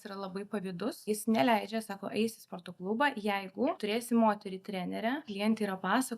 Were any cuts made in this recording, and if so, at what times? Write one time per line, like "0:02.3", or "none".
0:01.1
0:03.8
0:05.3